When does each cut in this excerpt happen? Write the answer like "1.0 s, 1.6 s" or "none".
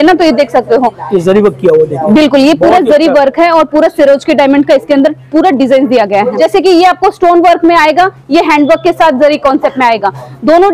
6.4 s